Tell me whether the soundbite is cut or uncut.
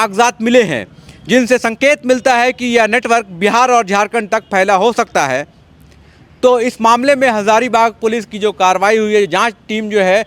uncut